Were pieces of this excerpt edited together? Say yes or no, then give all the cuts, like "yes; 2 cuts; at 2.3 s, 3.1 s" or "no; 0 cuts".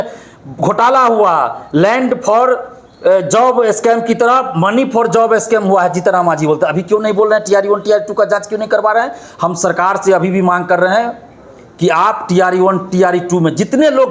no; 0 cuts